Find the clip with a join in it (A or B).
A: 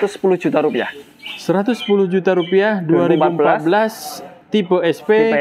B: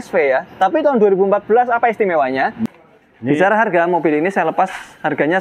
B